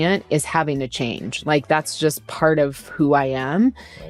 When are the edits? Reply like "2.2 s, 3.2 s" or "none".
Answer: none